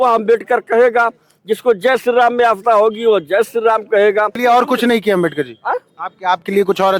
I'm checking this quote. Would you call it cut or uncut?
cut